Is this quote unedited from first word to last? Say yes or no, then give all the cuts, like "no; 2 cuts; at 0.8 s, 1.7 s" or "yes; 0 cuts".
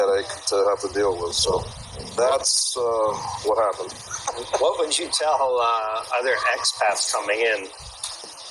yes; 0 cuts